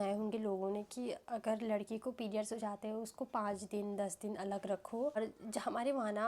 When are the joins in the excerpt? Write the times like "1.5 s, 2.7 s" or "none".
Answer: 5.2 s